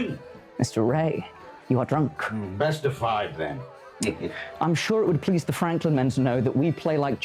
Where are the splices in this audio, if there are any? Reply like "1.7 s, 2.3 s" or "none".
none

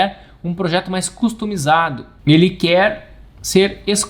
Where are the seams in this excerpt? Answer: 2.1 s

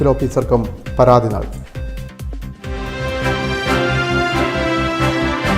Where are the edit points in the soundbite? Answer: 2.9 s

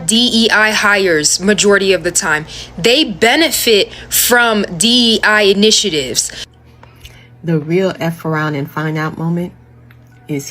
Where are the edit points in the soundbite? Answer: 6.5 s

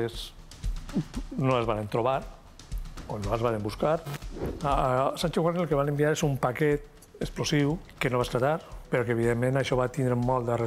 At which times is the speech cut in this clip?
4.5 s, 7.9 s, 8.9 s

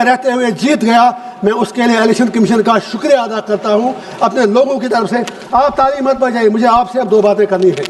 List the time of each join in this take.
none

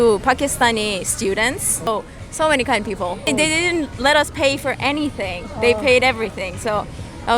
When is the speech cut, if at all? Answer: 1.9 s, 3.3 s

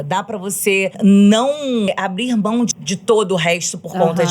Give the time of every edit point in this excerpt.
1.0 s, 1.9 s, 2.8 s

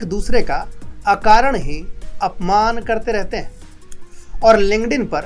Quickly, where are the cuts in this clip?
none

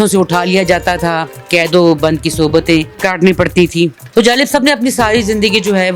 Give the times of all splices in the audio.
1.4 s, 2.9 s, 4.0 s

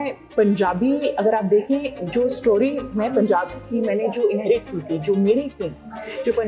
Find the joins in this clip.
none

